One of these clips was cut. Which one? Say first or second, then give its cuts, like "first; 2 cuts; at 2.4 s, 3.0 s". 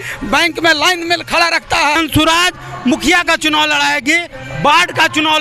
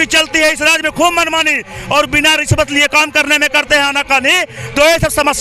first; 1 cut; at 2.0 s